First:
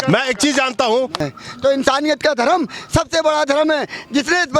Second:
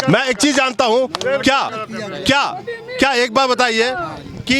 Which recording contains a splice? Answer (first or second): first